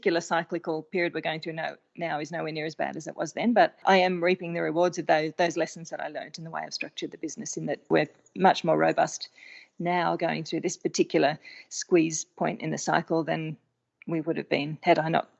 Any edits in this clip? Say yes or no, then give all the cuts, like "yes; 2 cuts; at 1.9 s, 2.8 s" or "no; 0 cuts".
yes; 2 cuts; at 3.8 s, 7.9 s